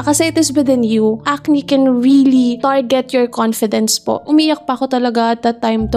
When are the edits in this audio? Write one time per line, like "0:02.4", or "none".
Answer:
0:01.3
0:02.6
0:04.2

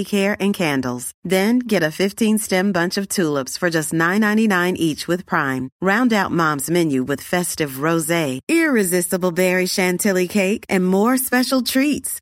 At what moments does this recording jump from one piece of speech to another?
none

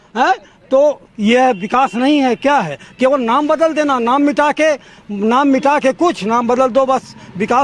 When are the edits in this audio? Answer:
none

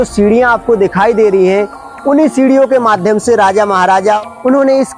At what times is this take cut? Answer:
0:04.0

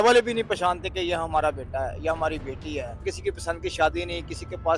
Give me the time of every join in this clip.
0:03.0

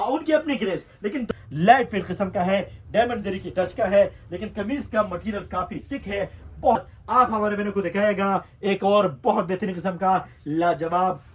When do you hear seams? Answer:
0:01.3
0:06.8

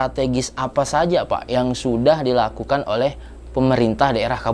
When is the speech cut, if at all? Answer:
none

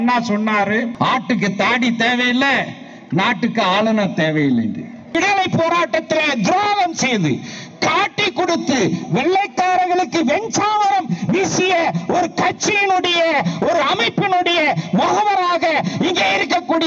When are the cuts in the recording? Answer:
0:00.9
0:05.1

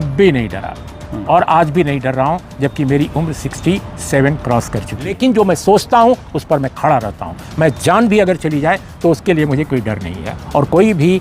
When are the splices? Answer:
0:05.1

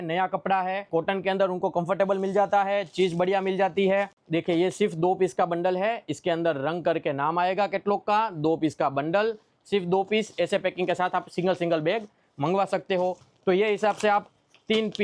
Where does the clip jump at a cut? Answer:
0:00.9
0:04.2
0:13.3

